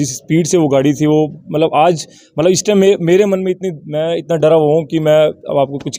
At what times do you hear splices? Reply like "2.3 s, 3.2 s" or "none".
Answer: none